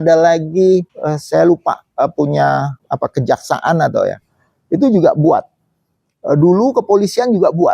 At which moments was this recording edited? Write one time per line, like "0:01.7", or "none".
0:00.9
0:02.8